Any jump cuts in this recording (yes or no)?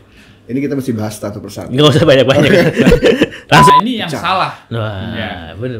yes